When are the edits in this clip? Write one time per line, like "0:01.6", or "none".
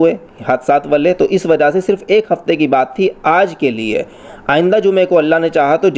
none